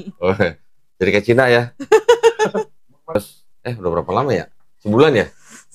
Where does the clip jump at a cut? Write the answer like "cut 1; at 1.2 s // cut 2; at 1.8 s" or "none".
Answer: cut 1; at 3.2 s